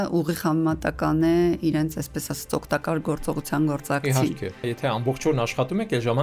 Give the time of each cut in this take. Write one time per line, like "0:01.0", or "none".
0:04.6